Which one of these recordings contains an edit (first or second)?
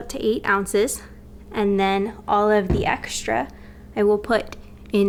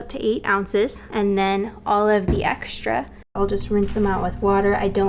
second